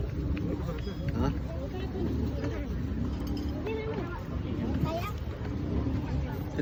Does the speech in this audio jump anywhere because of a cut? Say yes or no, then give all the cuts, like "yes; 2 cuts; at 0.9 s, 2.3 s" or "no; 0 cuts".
no; 0 cuts